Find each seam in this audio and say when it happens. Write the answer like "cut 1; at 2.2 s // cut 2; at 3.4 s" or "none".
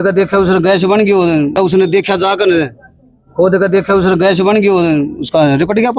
none

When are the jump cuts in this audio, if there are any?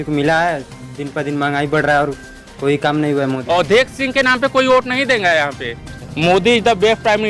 cut 1; at 3.4 s // cut 2; at 6.0 s

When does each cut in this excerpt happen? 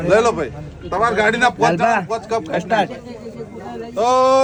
none

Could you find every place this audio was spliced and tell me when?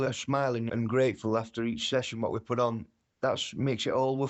none

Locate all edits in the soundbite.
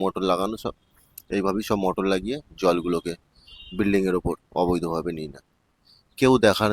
none

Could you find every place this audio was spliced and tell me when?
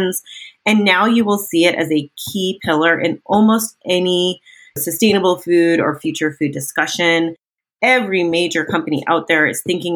cut 1; at 4.8 s

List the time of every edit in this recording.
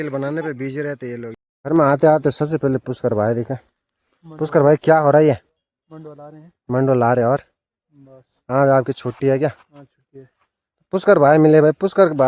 cut 1; at 1.4 s

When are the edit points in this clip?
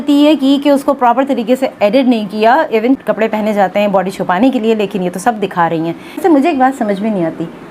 cut 1; at 3.0 s // cut 2; at 6.1 s

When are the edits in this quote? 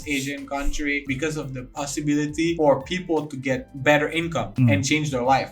cut 1; at 1.0 s // cut 2; at 2.6 s // cut 3; at 3.7 s // cut 4; at 4.5 s

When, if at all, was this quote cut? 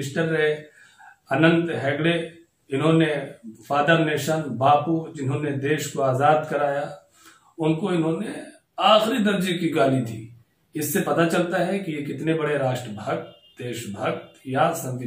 none

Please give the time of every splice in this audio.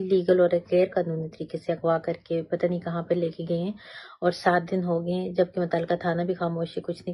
none

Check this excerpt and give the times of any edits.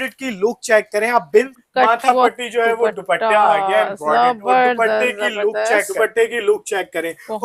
cut 1; at 1.6 s // cut 2; at 6.0 s

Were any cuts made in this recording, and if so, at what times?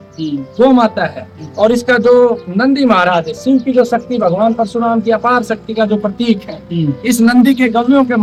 none

